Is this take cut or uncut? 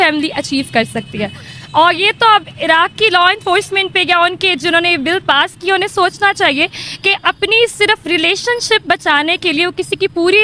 uncut